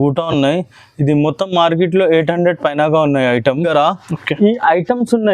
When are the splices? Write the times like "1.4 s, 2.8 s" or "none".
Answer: 3.7 s